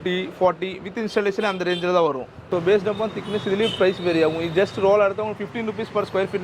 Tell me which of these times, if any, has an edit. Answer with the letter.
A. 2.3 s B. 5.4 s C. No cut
A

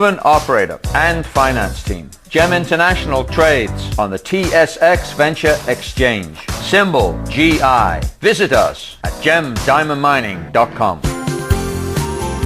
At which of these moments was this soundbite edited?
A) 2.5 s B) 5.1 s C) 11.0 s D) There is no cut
C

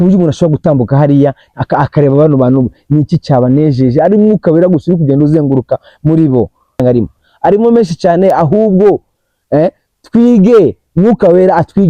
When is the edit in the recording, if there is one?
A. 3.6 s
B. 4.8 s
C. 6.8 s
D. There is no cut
C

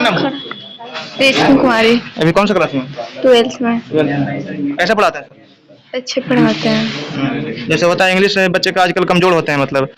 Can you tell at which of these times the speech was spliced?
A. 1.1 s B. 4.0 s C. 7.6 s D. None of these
D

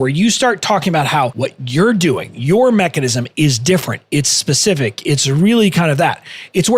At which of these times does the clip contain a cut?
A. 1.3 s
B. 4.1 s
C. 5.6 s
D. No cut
A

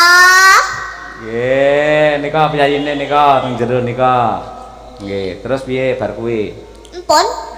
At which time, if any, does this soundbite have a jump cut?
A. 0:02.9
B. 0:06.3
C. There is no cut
C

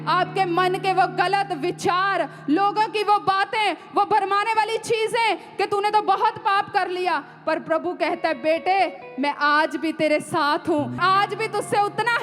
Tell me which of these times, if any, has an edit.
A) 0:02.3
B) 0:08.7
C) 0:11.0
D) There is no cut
C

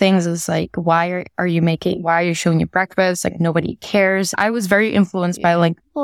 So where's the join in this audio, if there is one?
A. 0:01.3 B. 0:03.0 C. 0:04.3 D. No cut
C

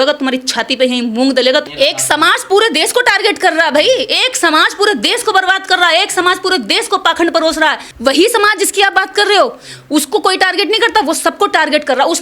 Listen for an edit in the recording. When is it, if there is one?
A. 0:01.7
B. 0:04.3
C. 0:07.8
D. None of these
A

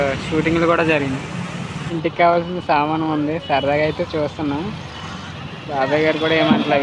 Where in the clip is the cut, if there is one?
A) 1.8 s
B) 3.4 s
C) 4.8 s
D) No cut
A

